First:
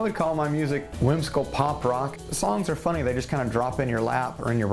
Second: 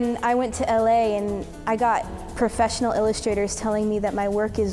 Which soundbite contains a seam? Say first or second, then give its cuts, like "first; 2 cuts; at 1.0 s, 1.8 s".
first; 1 cut; at 2.2 s